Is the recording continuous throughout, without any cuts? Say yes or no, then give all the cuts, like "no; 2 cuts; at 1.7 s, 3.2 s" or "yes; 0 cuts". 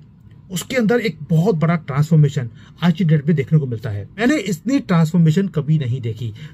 no; 1 cut; at 4.2 s